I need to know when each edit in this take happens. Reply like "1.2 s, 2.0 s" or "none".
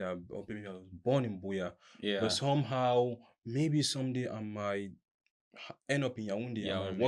none